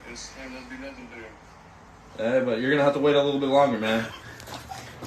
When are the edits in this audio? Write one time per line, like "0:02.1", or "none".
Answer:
none